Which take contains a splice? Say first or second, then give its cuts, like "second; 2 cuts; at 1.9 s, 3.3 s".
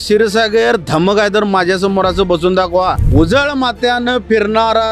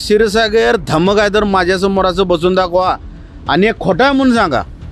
first; 1 cut; at 3.0 s